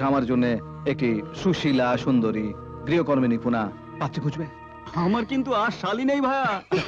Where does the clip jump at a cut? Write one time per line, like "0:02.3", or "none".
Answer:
none